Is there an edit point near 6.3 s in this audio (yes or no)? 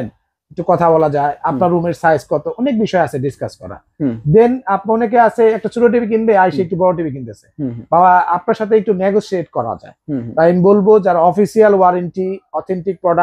no